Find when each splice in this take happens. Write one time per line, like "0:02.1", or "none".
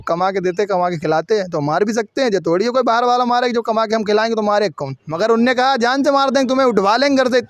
none